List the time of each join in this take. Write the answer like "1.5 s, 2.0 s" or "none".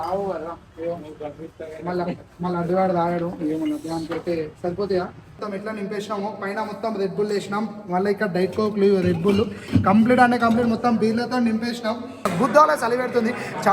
5.4 s, 12.3 s